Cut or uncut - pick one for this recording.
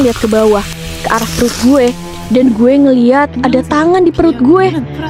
uncut